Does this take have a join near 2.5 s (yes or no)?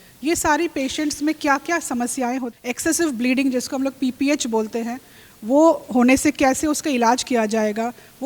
yes